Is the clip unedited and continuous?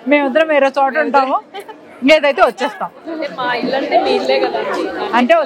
yes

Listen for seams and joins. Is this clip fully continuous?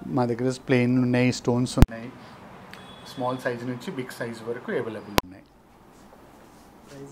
yes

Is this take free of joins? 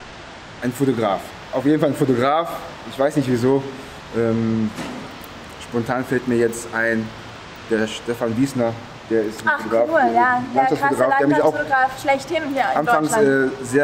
yes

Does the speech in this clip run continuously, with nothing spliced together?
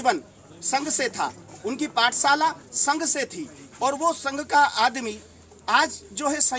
yes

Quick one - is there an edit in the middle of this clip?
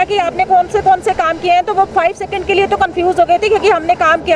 no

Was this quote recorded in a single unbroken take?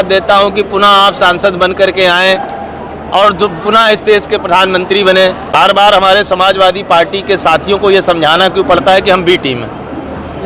no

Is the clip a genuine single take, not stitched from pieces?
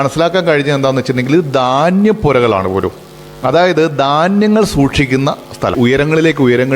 no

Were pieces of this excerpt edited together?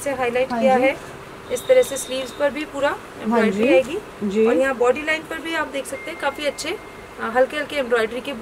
no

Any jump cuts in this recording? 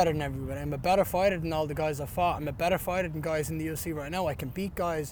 no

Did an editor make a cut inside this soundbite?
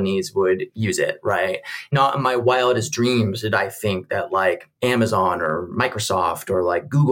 yes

